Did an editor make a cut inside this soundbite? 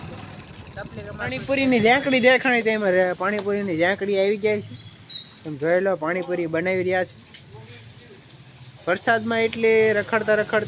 yes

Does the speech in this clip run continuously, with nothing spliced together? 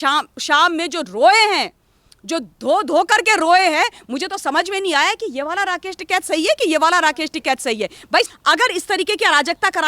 no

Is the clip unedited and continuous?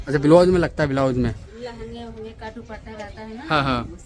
yes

